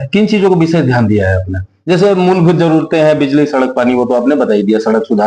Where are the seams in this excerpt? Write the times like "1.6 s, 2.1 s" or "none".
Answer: none